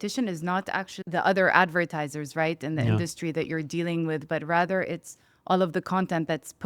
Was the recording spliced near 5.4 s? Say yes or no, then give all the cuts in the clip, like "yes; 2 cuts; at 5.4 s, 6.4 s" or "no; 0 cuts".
no; 1 cut; at 0.9 s